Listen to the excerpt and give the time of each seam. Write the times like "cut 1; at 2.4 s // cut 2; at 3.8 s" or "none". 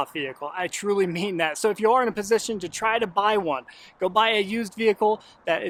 none